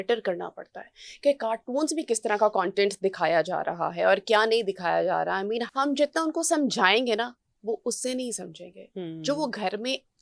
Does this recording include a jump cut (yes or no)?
yes